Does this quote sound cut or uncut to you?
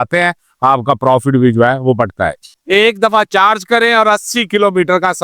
cut